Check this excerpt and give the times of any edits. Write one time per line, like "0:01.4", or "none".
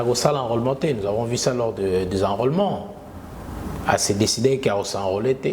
none